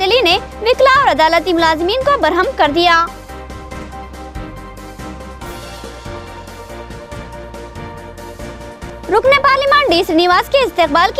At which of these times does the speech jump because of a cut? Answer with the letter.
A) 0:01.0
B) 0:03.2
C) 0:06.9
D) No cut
D